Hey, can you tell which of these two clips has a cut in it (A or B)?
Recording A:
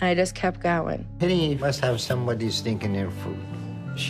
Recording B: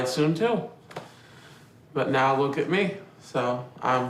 A